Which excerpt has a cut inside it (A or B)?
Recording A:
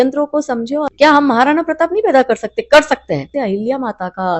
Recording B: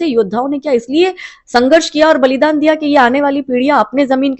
A